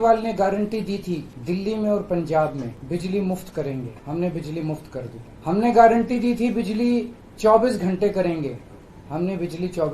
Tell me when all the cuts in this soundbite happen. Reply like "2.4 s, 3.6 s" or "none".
1.3 s, 2.8 s, 4.0 s, 5.2 s